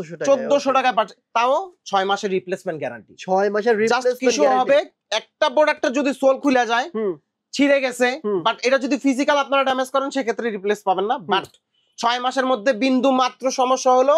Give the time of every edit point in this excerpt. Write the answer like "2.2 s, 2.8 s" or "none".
none